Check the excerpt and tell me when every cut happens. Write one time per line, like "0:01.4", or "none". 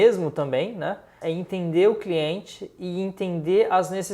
0:01.1